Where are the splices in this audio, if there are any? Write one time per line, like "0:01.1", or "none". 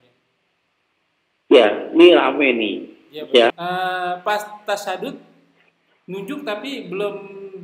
0:03.6